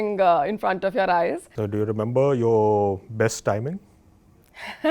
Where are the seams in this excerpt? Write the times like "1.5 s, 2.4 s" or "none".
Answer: 1.5 s